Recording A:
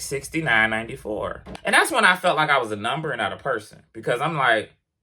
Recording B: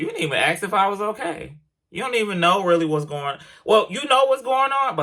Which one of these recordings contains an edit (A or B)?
A